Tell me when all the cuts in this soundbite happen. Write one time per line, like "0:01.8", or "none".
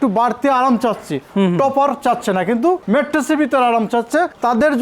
none